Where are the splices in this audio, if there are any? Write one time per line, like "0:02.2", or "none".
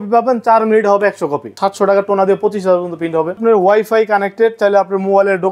0:01.5
0:03.4